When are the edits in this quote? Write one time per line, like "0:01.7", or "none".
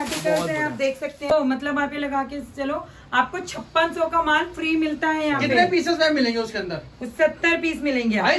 0:01.3